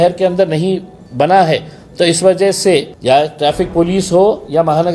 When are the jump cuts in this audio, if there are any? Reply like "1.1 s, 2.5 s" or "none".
2.9 s